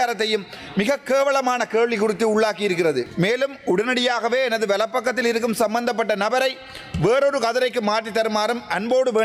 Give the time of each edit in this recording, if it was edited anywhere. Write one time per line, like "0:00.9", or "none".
0:03.1